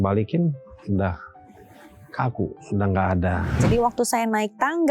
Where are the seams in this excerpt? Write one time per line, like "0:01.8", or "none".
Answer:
0:03.6